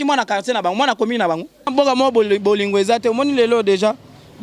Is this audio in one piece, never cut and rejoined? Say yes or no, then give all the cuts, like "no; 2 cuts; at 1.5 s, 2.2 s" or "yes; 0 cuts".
no; 1 cut; at 1.5 s